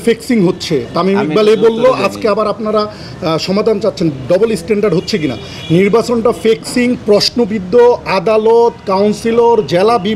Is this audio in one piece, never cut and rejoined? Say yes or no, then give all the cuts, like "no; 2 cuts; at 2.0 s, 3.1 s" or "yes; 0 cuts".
yes; 0 cuts